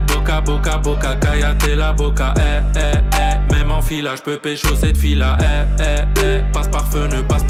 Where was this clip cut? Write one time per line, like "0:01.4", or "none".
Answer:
none